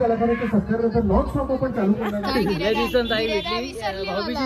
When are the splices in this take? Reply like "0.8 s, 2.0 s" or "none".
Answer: 2.1 s